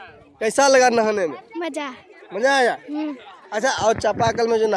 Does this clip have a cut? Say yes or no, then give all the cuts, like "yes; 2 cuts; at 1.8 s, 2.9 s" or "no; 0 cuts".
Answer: no; 0 cuts